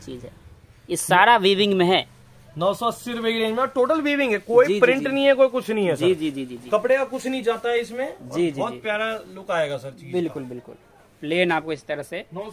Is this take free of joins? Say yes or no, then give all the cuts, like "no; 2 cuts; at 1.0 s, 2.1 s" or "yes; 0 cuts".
yes; 0 cuts